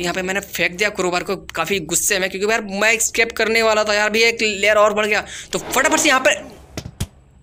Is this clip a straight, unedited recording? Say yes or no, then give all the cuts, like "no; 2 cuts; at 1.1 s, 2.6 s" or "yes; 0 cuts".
no; 1 cut; at 6.3 s